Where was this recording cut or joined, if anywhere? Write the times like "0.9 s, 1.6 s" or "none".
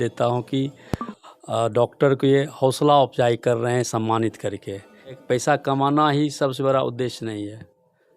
5.2 s